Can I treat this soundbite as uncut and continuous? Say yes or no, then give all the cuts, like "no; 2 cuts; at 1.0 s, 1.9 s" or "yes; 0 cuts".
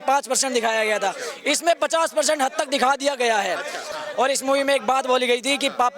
no; 1 cut; at 3.9 s